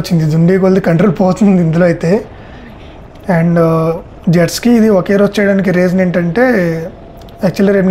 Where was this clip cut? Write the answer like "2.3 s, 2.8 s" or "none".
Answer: none